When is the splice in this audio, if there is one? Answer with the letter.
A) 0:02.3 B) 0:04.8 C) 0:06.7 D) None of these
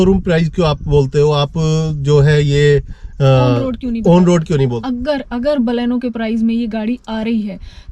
B